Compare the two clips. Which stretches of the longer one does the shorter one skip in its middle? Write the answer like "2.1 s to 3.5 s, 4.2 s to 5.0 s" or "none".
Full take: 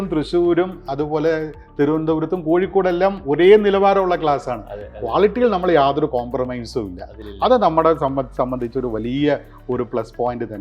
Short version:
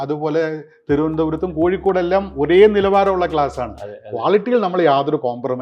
none